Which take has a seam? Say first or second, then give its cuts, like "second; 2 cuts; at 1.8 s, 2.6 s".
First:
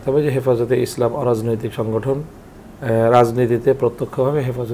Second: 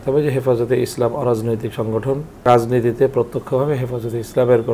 second; 1 cut; at 2.5 s